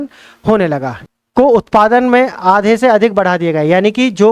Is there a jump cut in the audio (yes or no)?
yes